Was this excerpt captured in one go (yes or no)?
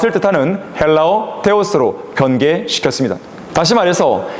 no